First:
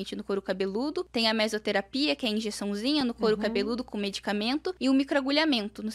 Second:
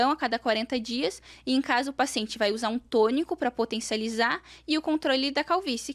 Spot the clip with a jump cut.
first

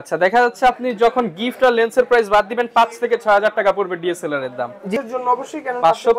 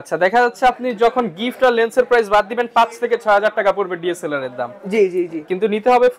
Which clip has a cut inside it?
first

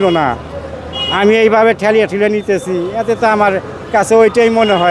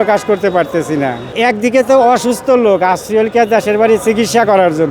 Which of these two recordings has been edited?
second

